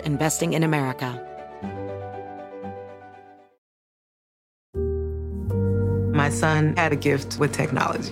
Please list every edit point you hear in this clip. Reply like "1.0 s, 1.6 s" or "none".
1.1 s

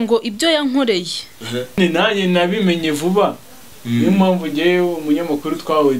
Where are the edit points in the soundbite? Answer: 1.8 s

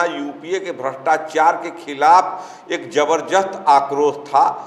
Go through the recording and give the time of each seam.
none

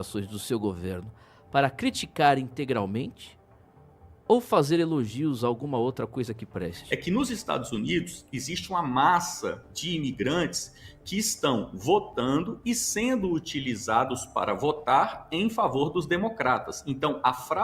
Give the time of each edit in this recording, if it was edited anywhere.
6.8 s

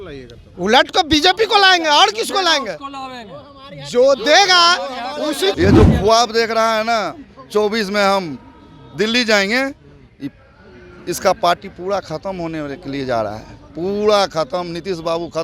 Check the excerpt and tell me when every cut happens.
5.5 s

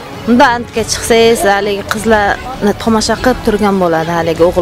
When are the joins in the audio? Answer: none

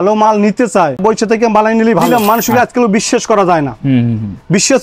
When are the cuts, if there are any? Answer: 1.0 s, 2.1 s

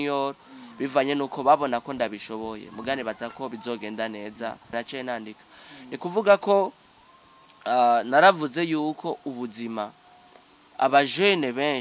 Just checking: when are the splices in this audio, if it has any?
4.7 s

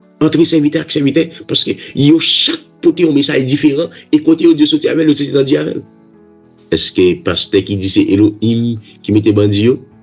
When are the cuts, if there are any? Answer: 6.5 s

